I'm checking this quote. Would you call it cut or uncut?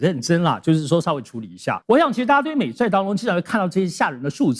cut